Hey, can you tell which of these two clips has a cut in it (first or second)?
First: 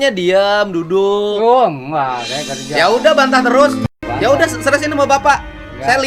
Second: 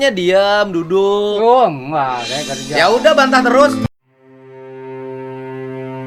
first